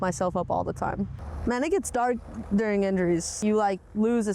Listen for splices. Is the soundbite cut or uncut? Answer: cut